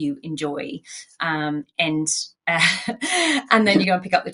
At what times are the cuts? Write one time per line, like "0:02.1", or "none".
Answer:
none